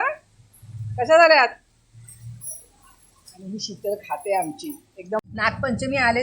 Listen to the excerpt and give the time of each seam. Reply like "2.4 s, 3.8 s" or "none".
5.2 s